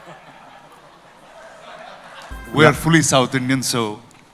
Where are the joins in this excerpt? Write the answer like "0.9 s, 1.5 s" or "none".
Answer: 2.3 s